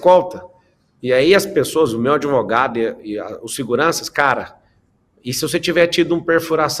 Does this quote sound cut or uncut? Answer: uncut